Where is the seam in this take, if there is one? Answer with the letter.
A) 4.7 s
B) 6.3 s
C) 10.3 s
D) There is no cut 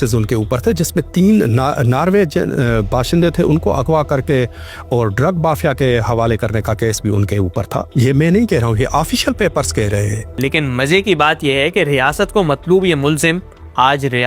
C